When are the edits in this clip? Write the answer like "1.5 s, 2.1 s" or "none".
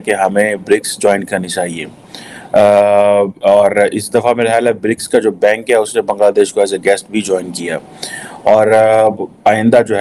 none

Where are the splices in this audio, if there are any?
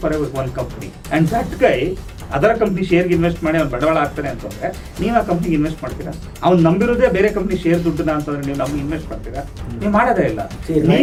none

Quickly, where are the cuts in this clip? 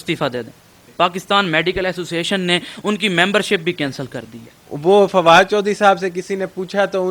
0.9 s, 4.7 s

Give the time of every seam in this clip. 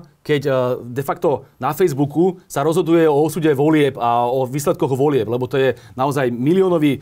none

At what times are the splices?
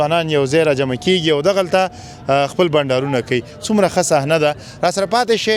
none

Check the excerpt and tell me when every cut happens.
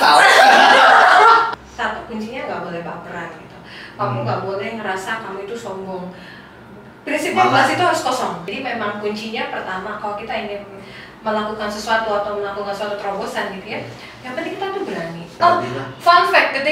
1.5 s, 8.5 s, 15.3 s

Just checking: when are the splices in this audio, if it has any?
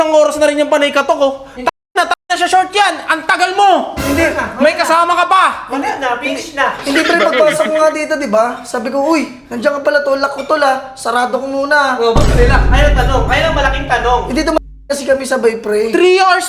none

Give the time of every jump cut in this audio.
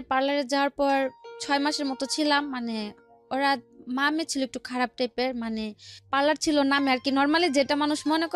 none

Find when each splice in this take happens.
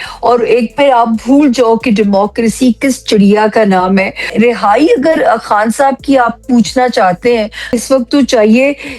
4.3 s, 7.8 s

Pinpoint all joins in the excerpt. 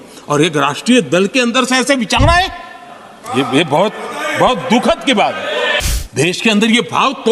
5.8 s

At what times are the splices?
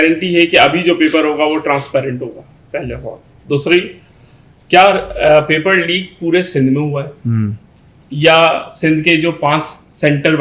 none

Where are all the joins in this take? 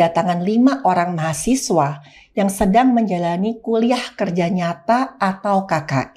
none

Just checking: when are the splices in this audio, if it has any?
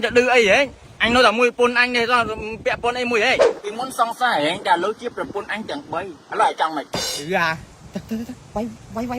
3.4 s

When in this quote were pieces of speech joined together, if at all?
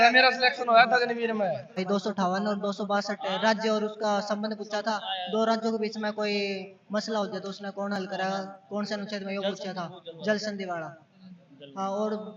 1.8 s

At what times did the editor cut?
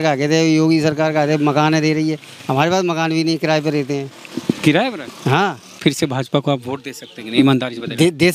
5.8 s

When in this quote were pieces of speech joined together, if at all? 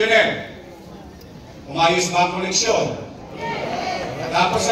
none

